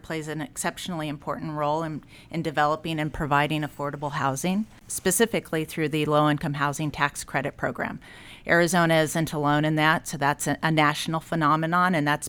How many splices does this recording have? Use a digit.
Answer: 0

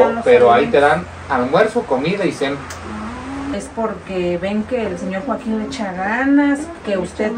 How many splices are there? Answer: 1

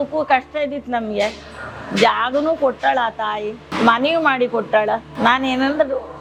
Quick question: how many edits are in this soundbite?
0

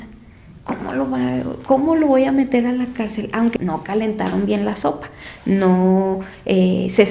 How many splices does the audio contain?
1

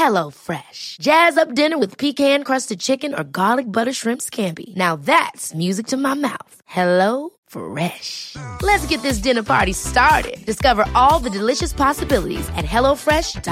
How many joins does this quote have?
0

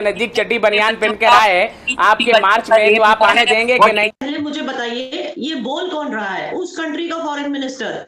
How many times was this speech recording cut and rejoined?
1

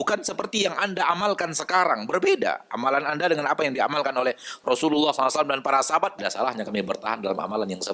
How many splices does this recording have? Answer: 1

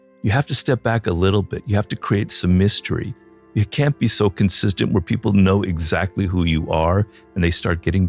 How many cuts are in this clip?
0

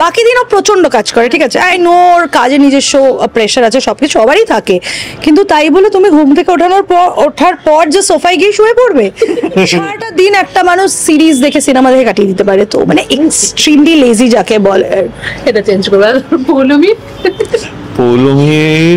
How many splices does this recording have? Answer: 0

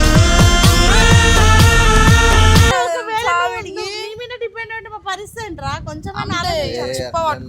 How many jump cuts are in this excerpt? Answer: 1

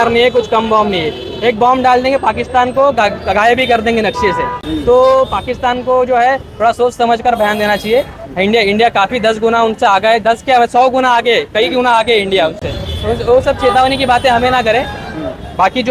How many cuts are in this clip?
0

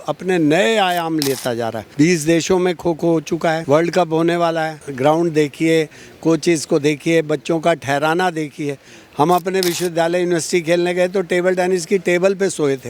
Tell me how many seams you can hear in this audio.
3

